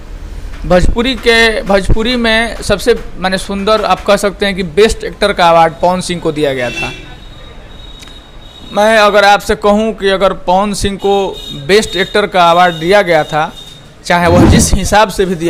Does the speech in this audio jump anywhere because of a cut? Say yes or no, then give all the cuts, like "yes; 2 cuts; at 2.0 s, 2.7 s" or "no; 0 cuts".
no; 0 cuts